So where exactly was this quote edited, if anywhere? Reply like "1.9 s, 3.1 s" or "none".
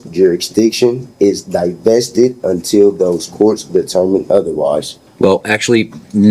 5.0 s